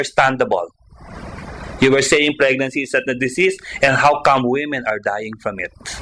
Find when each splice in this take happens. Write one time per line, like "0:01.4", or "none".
none